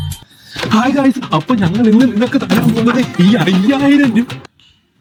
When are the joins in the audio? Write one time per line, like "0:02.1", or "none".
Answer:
none